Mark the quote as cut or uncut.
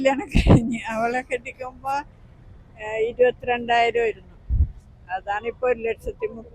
uncut